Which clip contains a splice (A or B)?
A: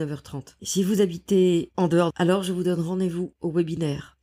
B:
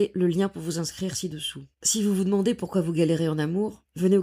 A